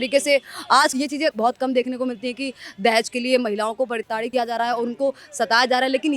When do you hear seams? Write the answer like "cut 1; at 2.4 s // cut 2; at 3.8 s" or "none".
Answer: cut 1; at 0.9 s // cut 2; at 4.0 s